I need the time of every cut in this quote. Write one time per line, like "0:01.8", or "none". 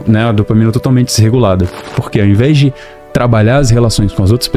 0:01.8